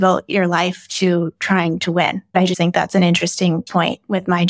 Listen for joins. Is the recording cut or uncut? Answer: cut